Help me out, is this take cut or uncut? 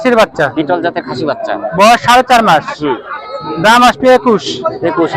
uncut